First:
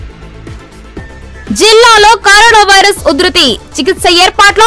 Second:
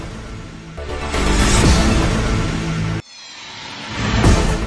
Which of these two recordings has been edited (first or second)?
first